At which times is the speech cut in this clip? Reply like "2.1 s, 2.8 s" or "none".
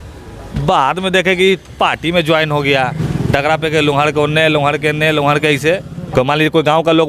3.0 s, 6.0 s